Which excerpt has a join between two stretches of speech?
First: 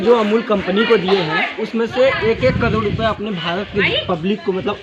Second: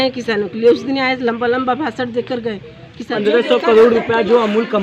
second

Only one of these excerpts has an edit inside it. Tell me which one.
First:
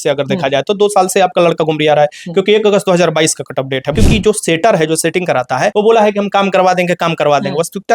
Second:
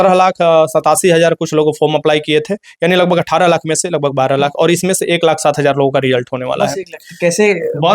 first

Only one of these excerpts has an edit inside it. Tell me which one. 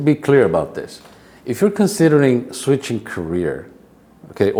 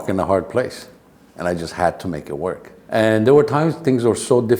second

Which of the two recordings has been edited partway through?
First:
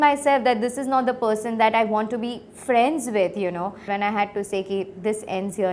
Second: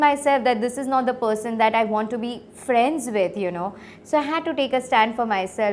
first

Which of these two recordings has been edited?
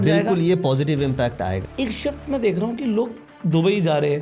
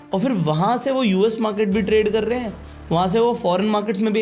first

